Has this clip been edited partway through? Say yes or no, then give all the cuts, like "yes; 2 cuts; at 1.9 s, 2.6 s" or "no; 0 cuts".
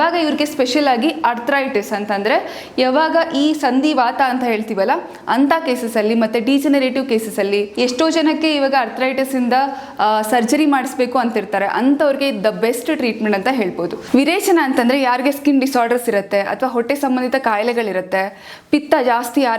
yes; 2 cuts; at 7.7 s, 14.0 s